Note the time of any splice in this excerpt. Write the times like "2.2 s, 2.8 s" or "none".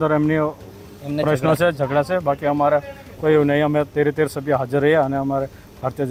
none